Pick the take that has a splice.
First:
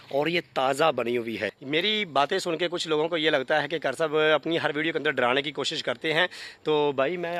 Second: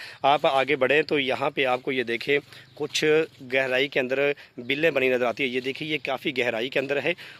first; 1 cut; at 1.6 s

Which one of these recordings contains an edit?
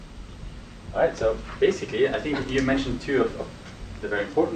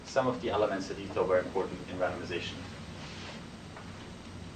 first; 1 cut; at 1.5 s

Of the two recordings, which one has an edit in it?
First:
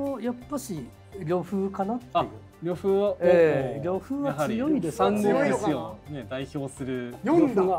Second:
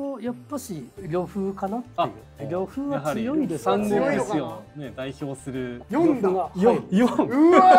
second; 2 cuts; at 0.9 s, 2.4 s

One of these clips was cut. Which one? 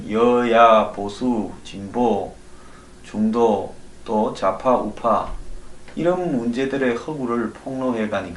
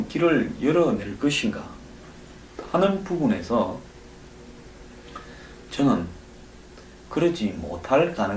second; 1 cut; at 5.2 s

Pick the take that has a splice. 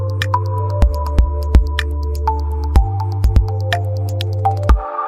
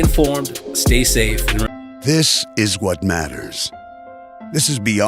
second; 1 cut; at 1.7 s

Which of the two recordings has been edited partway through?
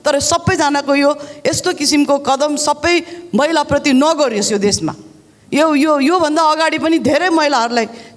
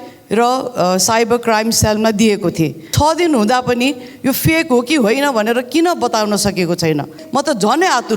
second; 2 cuts; at 2.9 s, 7.2 s

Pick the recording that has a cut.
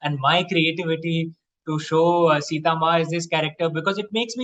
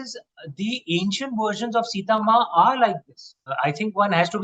second; 1 cut; at 3.5 s

